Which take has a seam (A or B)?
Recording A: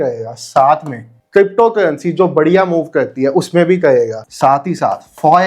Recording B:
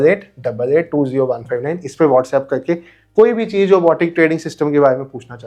A